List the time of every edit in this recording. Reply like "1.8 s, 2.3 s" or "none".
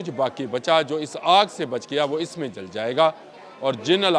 none